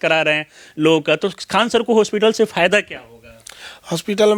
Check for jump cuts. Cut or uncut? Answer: uncut